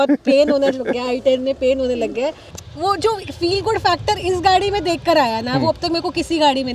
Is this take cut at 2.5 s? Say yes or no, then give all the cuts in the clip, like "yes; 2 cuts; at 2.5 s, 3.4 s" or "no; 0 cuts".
yes; 1 cut; at 2.5 s